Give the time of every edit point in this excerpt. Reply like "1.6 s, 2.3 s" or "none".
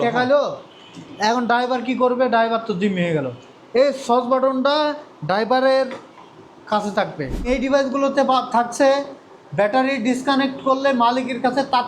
7.4 s

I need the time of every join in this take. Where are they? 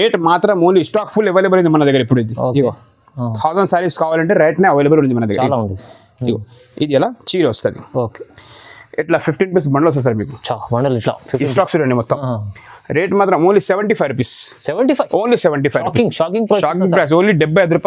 none

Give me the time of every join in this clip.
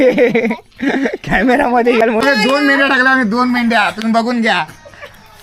2.0 s

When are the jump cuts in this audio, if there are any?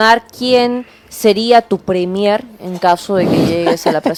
none

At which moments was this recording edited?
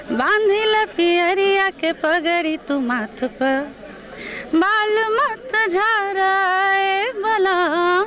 none

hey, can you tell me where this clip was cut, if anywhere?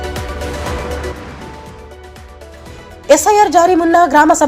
2.4 s

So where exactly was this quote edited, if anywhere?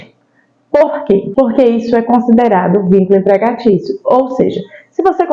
1.3 s

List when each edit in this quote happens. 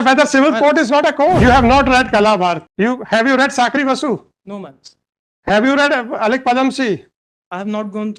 1.4 s, 2.7 s

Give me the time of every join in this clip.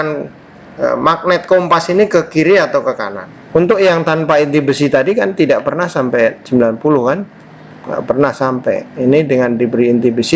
3.6 s

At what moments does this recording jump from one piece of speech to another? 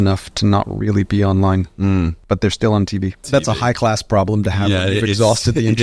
2.2 s, 3.2 s

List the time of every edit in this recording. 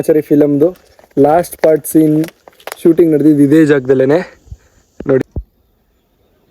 5.2 s

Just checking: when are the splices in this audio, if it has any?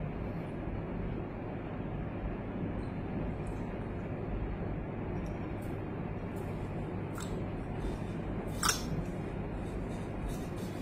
none

